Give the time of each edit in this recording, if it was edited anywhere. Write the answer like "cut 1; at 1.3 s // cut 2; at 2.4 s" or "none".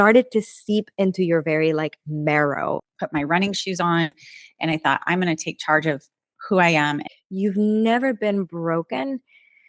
cut 1; at 2.9 s // cut 2; at 7.1 s